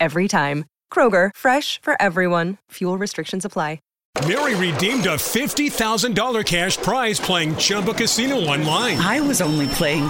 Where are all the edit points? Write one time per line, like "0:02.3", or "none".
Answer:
0:03.9

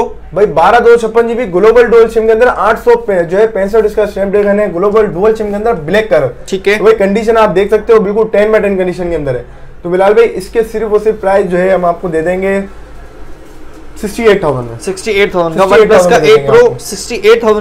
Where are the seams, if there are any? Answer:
none

